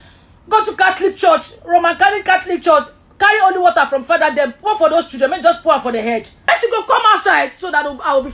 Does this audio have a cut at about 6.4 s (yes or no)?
yes